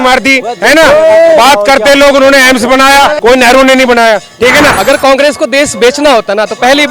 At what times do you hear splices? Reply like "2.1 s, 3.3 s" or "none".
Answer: 3.2 s, 4.7 s